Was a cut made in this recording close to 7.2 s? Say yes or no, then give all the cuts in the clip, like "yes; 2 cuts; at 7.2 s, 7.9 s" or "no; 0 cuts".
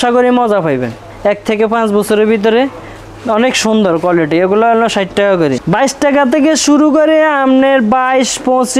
no; 2 cuts; at 1.1 s, 5.6 s